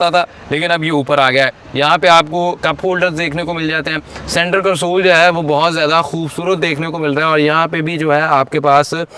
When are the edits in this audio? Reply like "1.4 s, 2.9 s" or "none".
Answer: none